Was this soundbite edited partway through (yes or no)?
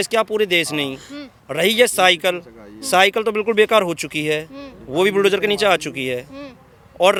no